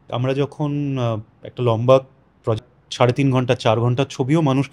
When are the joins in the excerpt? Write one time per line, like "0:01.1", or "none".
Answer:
0:02.7